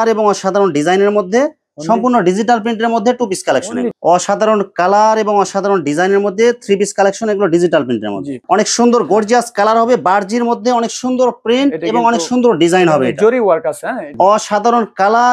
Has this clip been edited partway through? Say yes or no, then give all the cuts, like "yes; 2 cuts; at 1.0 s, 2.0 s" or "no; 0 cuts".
yes; 3 cuts; at 3.9 s, 8.4 s, 14.1 s